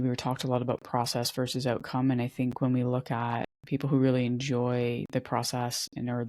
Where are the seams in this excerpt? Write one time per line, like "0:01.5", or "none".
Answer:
0:03.6